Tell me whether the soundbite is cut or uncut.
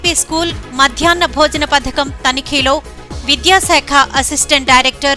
uncut